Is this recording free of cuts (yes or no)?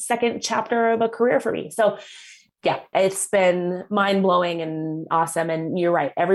no